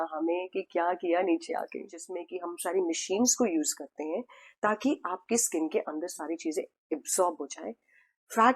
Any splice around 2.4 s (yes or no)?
yes